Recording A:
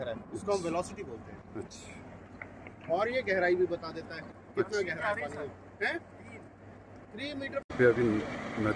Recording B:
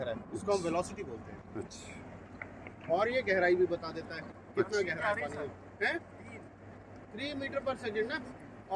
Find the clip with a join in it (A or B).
A